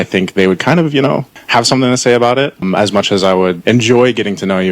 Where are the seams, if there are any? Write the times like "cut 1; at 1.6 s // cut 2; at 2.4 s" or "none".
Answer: cut 1; at 3.8 s